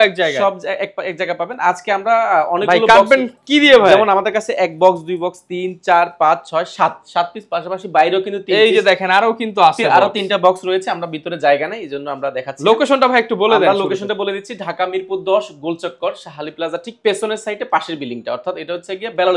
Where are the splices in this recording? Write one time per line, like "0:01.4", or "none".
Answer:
none